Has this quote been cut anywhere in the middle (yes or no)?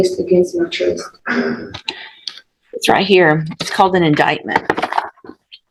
no